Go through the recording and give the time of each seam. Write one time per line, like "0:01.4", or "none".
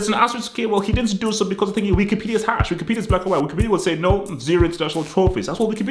none